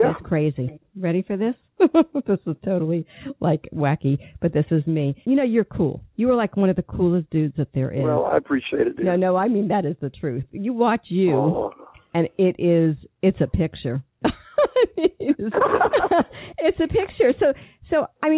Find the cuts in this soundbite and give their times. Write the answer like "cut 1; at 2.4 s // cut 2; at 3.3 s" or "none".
cut 1; at 5.2 s